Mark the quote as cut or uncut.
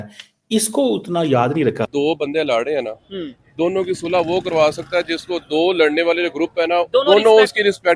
cut